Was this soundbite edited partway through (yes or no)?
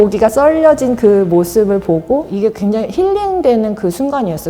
yes